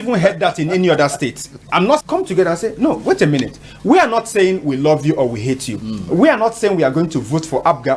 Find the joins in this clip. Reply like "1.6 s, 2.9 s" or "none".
2.0 s